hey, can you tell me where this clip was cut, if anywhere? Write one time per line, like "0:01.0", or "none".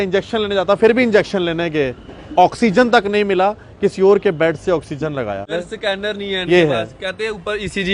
0:05.6